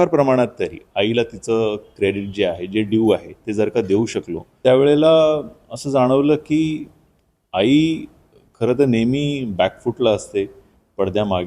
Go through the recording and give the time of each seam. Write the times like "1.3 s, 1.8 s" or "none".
4.4 s